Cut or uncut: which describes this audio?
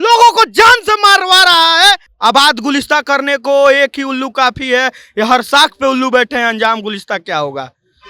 cut